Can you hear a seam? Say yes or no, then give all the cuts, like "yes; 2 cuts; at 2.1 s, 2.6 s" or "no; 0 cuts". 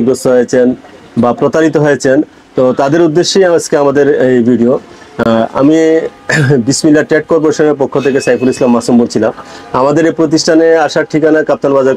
no; 0 cuts